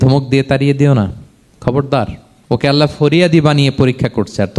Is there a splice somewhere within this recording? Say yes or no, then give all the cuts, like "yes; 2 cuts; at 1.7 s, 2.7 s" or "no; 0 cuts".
yes; 1 cut; at 2.3 s